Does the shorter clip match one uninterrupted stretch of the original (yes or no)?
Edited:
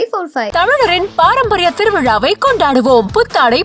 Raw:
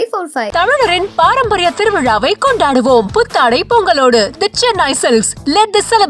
yes